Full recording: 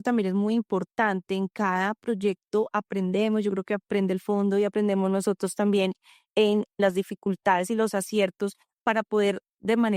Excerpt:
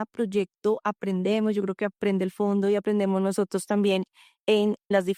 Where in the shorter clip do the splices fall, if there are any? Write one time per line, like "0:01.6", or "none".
none